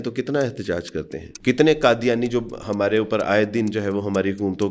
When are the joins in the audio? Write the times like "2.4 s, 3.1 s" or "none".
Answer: 1.3 s